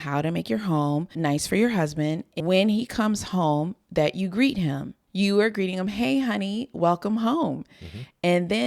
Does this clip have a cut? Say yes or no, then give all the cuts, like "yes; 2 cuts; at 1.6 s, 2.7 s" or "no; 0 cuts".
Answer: yes; 2 cuts; at 2.3 s, 5.0 s